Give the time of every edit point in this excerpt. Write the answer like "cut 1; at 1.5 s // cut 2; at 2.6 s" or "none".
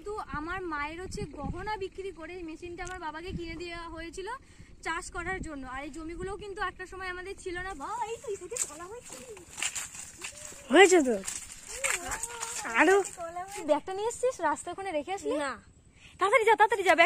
cut 1; at 7.8 s // cut 2; at 13.5 s